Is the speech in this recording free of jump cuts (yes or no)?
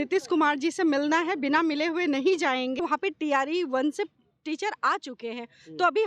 no